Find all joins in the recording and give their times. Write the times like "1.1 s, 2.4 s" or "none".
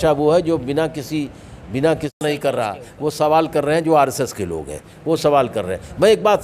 2.2 s